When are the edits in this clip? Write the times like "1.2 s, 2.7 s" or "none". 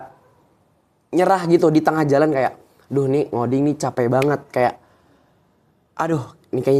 none